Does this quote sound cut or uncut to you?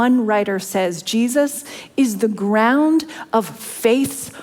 uncut